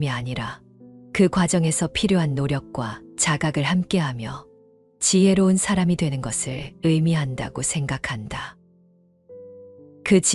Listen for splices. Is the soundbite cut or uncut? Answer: uncut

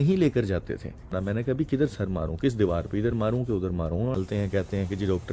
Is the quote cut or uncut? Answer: cut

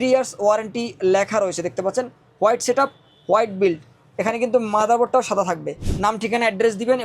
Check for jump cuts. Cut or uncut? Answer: cut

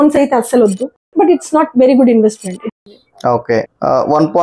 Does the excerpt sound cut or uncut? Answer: cut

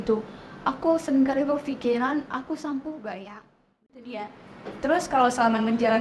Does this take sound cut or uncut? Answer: cut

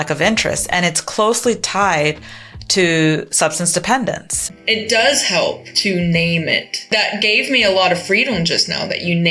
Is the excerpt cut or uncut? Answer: cut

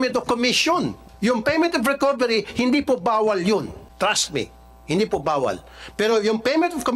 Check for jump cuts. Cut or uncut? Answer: cut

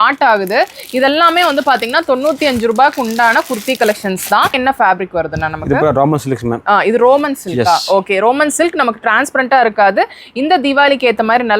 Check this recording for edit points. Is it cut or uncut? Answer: cut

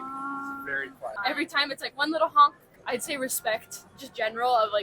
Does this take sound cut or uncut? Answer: cut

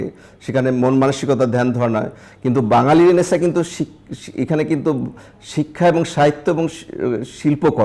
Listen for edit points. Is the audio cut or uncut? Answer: uncut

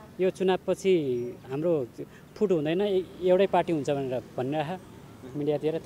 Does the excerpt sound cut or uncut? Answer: uncut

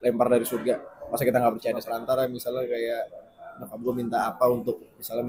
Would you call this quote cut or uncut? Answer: cut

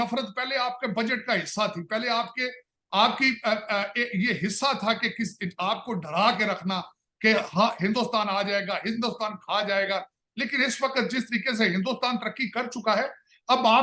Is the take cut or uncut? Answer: uncut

